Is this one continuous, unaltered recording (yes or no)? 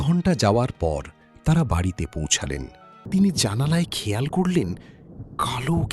no